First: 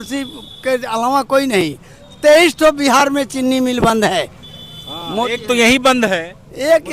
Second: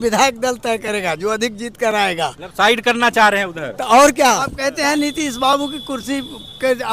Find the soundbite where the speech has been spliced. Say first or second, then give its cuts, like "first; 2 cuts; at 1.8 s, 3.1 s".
second; 1 cut; at 4.6 s